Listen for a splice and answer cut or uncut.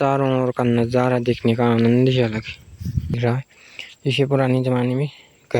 cut